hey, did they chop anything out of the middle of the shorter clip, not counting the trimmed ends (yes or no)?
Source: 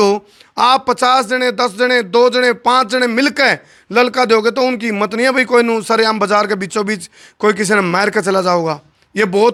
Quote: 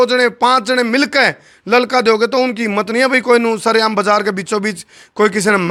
no